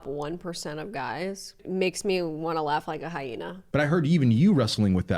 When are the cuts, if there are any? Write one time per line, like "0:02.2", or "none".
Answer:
0:03.6